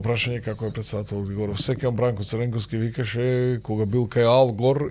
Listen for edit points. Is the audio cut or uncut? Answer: uncut